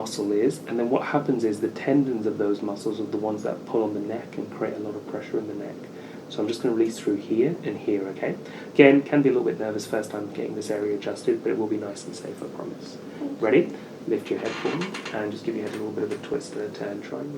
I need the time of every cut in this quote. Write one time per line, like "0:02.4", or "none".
none

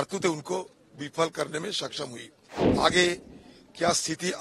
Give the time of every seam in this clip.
0:02.6

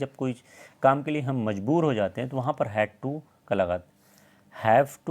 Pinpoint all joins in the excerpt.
none

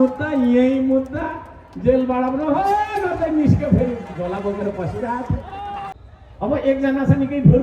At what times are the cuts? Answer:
0:06.0

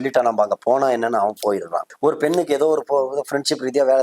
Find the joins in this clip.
0:01.8

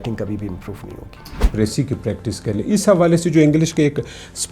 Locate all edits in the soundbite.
0:01.5

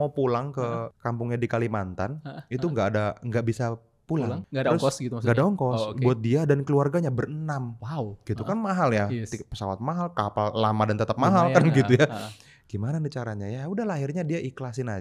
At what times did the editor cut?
0:00.9
0:04.4

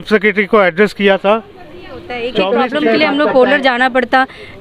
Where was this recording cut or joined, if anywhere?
0:02.4

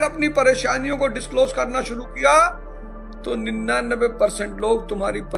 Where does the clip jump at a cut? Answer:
none

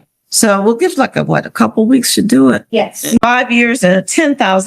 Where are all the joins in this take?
0:03.2

